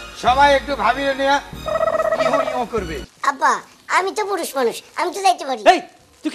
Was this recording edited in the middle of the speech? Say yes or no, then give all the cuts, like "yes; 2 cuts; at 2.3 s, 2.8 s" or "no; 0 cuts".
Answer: yes; 1 cut; at 3.1 s